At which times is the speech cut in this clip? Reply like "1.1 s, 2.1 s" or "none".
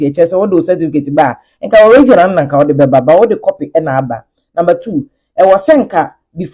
none